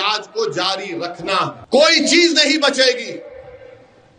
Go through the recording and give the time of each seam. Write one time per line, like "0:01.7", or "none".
0:01.6